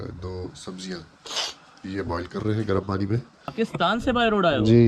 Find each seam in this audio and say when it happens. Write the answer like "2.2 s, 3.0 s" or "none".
3.5 s